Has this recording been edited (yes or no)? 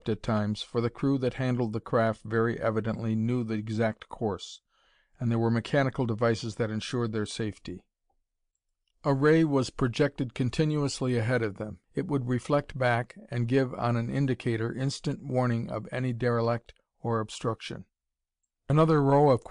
no